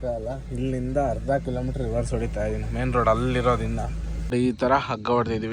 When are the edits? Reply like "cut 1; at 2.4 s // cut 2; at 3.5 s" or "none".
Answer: cut 1; at 4.3 s